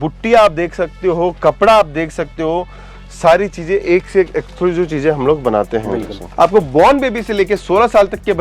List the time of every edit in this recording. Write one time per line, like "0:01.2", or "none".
0:06.2